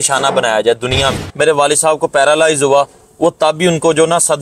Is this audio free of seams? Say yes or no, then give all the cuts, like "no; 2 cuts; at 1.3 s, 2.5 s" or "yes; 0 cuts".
no; 1 cut; at 1.2 s